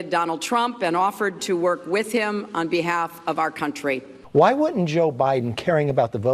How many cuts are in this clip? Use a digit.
1